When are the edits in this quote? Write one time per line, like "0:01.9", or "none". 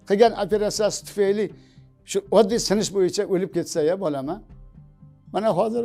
none